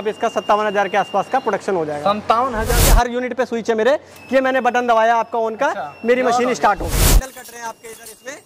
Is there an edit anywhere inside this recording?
yes; 2 cuts; at 2.8 s, 6.9 s

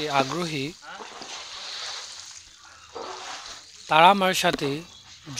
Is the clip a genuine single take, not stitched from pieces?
no; 2 cuts; at 1.0 s, 3.8 s

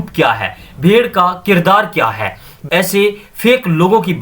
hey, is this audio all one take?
no; 1 cut; at 2.5 s

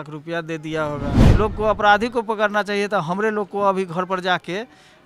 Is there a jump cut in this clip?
yes; 1 cut; at 1.2 s

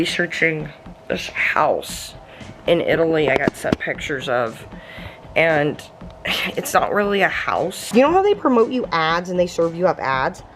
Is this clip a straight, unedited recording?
no; 1 cut; at 7.9 s

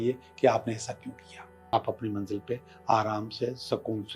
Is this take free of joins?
no; 1 cut; at 1.7 s

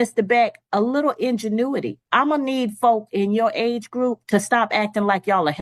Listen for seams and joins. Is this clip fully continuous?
yes; 0 cuts

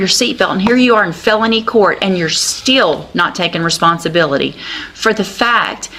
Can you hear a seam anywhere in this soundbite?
no; 0 cuts

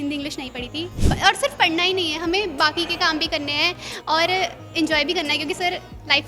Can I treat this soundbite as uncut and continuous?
no; 1 cut; at 1.0 s

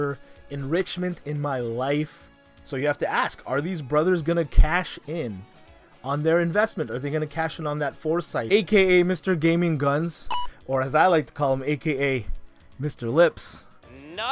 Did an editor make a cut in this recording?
yes; 2 cuts; at 2.6 s, 8.4 s

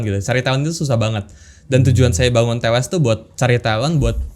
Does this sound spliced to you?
no; 0 cuts

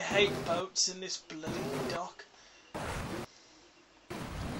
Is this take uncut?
no; 1 cut; at 1.0 s

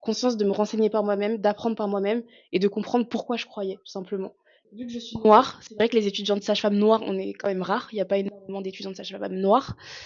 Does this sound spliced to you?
yes; 1 cut; at 4.5 s

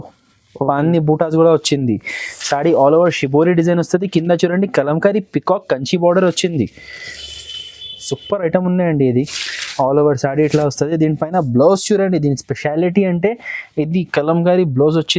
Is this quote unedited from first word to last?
yes; 0 cuts

